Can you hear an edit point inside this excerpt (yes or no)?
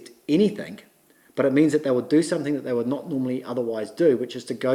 no